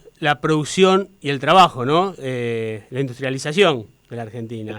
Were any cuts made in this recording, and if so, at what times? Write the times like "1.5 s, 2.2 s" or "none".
none

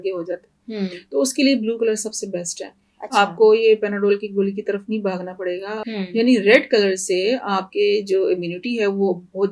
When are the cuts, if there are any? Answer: 5.7 s

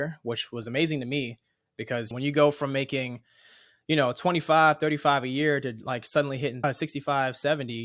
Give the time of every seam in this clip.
2.1 s, 6.6 s

